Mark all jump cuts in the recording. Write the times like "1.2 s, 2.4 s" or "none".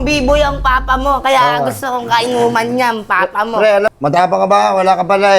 3.9 s